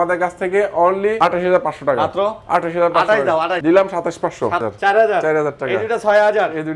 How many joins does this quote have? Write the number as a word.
three